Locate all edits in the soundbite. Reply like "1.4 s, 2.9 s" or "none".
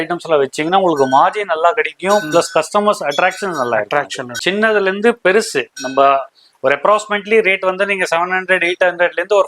4.2 s